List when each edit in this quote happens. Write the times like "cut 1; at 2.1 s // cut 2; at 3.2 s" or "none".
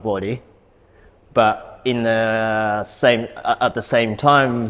none